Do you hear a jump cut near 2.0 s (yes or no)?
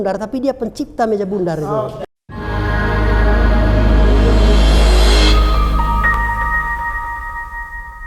yes